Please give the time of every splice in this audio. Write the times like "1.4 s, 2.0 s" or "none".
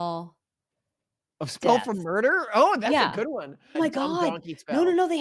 3.8 s